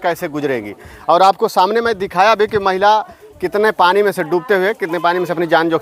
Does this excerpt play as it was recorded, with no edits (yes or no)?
yes